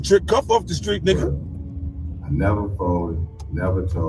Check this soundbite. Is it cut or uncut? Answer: uncut